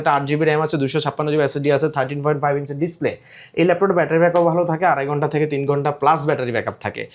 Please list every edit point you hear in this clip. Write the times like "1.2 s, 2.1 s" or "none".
none